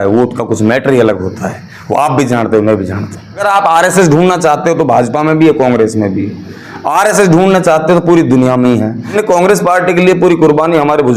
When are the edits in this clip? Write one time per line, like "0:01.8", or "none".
0:03.4
0:09.1